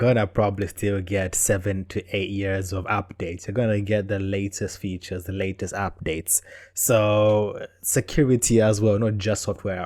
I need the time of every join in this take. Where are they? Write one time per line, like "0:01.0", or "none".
none